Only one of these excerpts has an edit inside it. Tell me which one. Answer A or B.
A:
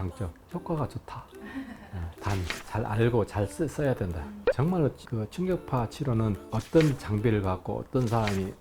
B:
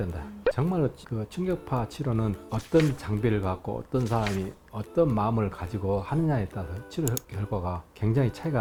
A